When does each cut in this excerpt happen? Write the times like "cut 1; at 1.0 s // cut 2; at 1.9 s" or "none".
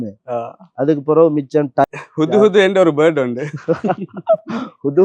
cut 1; at 1.8 s